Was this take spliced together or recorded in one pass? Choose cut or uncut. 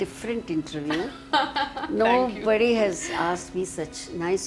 uncut